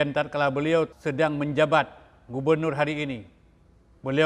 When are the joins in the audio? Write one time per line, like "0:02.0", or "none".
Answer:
0:00.9